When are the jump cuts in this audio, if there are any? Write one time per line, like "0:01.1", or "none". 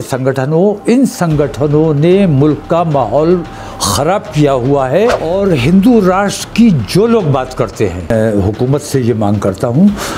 0:05.2
0:08.1